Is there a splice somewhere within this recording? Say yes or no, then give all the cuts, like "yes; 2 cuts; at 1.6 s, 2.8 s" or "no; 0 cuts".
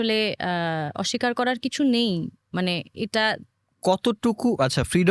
no; 0 cuts